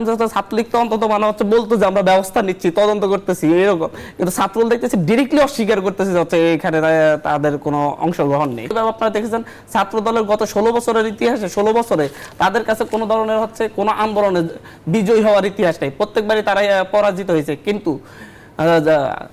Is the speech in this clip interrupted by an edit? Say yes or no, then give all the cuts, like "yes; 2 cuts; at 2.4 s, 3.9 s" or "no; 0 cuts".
yes; 1 cut; at 8.7 s